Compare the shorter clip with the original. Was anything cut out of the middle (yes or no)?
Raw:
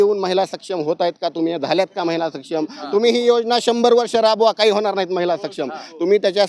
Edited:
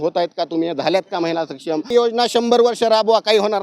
yes